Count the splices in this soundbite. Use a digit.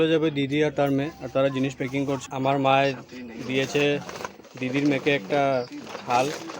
1